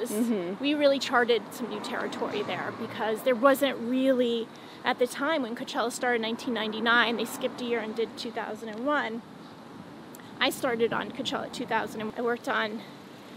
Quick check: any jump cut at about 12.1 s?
yes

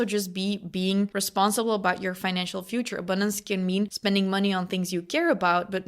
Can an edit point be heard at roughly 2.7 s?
no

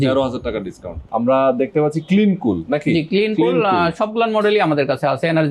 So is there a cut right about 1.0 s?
yes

